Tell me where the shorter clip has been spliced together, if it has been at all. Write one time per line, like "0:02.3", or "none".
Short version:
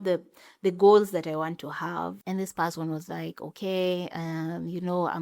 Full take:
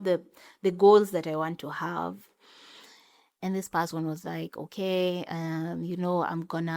0:02.2